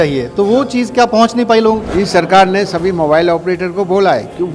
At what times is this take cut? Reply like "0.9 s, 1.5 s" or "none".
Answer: 1.8 s